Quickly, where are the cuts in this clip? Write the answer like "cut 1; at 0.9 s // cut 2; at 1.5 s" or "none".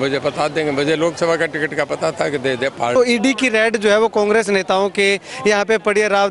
cut 1; at 3.0 s